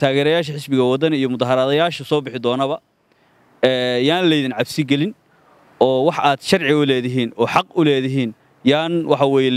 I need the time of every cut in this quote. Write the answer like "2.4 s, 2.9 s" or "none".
8.4 s

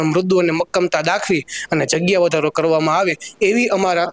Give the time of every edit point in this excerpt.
none

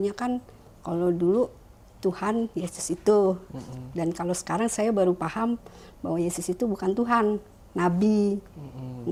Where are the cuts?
none

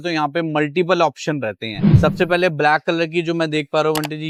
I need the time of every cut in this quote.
none

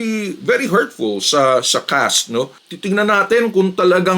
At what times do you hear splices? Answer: 2.6 s

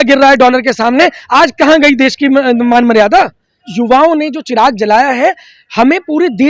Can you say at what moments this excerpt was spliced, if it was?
3.6 s

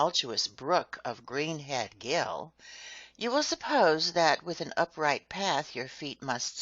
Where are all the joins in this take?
5.5 s

